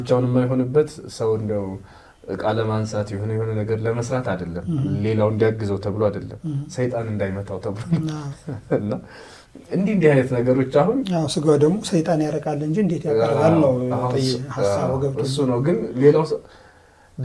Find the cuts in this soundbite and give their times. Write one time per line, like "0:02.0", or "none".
none